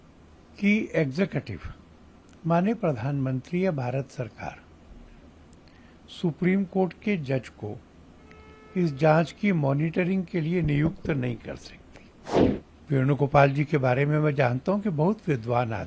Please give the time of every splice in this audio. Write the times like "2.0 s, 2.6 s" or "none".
12.4 s